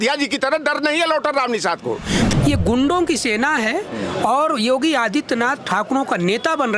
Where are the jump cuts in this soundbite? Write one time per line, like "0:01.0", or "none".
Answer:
0:02.2